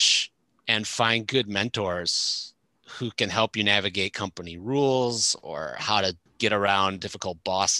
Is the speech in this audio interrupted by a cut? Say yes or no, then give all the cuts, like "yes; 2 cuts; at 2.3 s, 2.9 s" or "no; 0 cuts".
yes; 1 cut; at 6.3 s